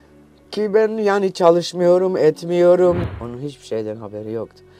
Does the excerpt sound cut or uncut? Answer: cut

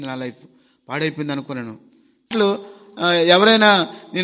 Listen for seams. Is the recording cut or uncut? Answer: cut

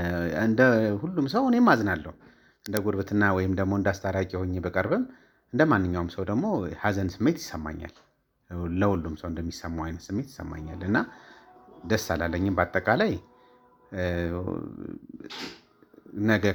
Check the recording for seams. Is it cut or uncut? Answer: uncut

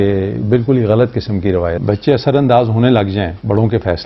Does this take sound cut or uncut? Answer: cut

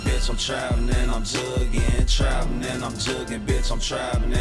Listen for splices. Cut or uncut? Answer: uncut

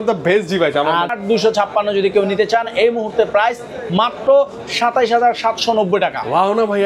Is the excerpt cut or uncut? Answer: cut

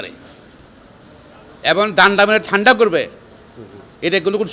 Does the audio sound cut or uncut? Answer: uncut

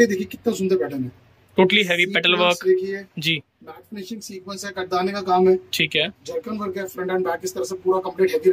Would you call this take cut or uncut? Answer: uncut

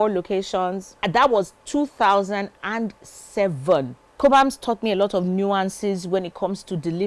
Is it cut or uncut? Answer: cut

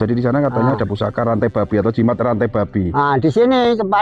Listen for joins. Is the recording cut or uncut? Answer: uncut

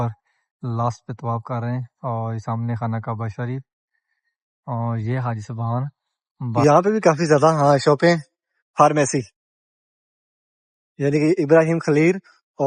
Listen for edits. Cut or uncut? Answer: cut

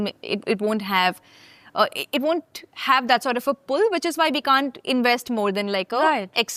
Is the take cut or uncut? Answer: uncut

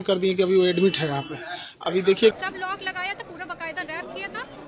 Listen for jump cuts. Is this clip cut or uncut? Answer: cut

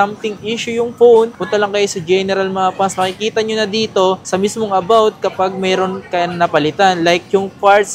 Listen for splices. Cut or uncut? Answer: uncut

